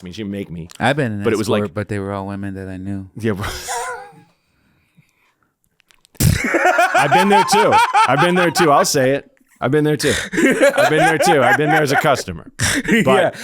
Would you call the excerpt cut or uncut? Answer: uncut